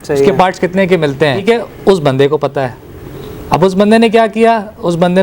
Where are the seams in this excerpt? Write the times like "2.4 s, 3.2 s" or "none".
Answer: 1.4 s